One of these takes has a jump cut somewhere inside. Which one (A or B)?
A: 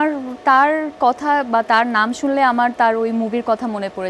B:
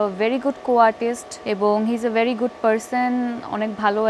B